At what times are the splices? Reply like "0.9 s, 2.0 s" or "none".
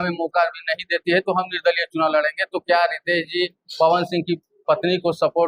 none